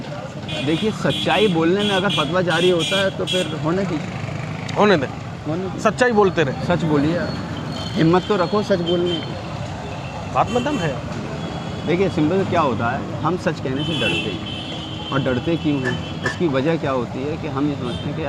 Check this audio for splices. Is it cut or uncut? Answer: uncut